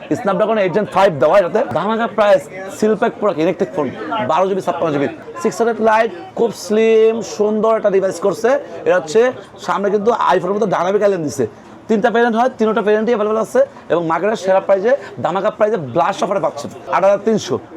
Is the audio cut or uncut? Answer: cut